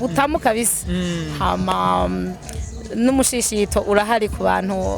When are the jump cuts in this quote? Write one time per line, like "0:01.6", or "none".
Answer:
none